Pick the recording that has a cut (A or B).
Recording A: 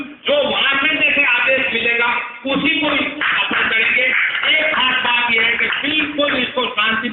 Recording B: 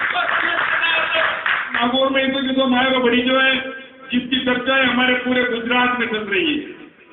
B